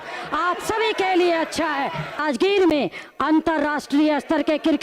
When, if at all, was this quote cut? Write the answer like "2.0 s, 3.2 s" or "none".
2.2 s